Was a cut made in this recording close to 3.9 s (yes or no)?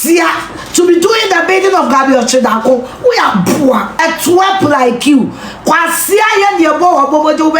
yes